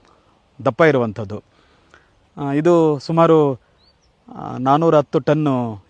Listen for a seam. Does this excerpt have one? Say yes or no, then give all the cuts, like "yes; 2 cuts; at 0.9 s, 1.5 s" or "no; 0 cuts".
no; 0 cuts